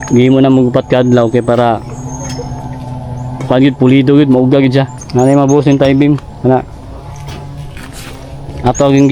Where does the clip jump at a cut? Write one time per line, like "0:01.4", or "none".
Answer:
0:05.0